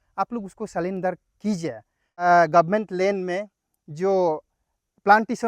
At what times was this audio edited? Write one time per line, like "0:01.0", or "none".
0:02.2